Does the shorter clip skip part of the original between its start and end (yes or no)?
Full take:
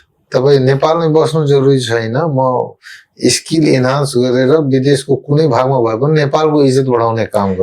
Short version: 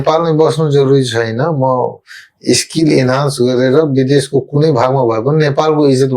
no